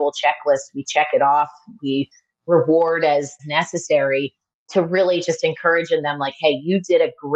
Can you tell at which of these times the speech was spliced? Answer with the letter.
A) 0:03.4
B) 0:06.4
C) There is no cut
A